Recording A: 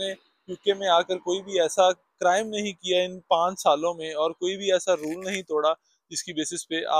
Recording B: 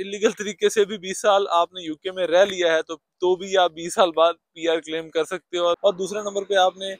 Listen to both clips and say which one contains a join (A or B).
B